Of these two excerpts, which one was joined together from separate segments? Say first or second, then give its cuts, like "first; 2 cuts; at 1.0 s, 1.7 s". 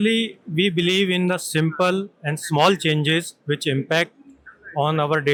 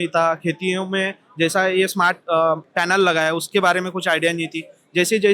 second; 1 cut; at 2.7 s